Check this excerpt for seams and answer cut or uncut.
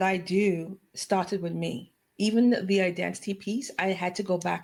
uncut